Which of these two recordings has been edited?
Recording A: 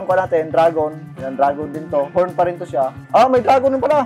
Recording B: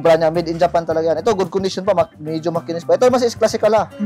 A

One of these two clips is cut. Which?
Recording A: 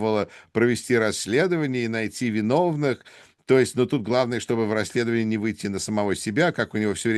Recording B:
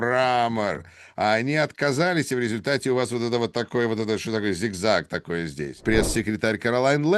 B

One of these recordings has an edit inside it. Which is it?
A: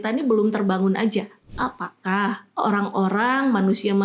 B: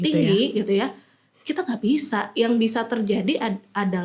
A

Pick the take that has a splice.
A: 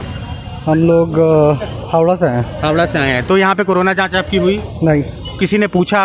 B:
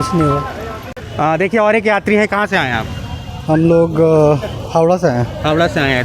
B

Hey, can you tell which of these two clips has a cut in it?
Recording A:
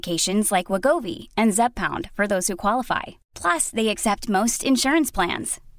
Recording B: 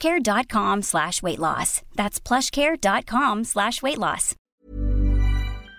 B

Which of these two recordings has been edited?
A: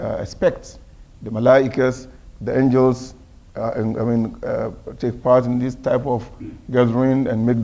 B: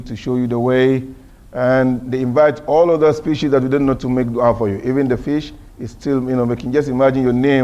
B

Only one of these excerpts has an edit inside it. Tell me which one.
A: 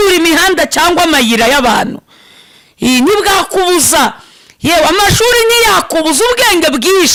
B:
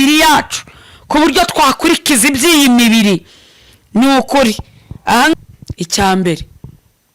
B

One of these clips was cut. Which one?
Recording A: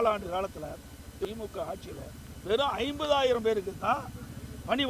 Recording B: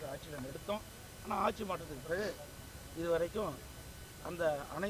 A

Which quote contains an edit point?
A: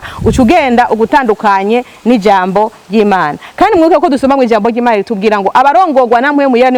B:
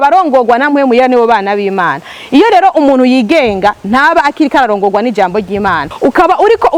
B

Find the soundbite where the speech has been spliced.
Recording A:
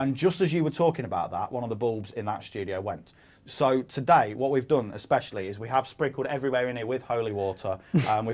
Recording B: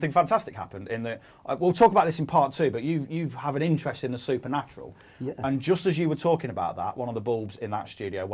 B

